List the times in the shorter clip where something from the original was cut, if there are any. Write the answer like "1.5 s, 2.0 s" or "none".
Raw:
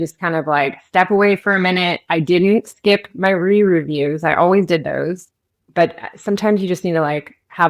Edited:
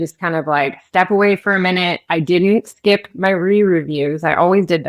none